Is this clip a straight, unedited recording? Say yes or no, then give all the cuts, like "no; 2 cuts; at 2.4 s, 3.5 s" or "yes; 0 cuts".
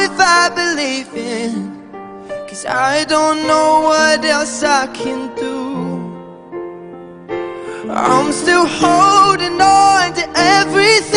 yes; 0 cuts